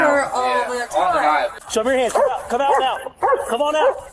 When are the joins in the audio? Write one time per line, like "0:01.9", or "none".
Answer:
0:01.6